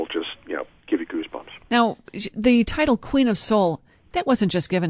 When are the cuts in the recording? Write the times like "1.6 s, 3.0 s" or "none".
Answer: none